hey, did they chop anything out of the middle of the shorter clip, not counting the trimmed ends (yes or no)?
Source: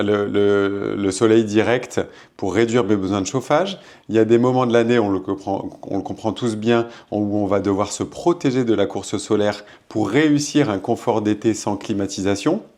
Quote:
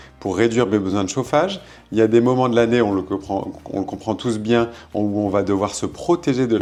no